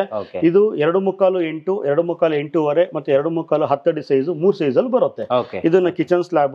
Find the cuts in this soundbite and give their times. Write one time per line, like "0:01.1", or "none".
none